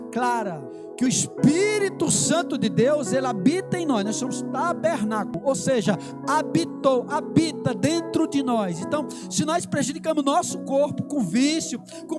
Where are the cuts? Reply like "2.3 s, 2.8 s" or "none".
1.0 s, 5.4 s